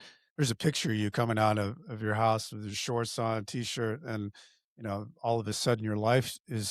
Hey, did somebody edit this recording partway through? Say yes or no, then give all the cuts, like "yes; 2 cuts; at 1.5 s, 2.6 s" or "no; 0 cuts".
no; 0 cuts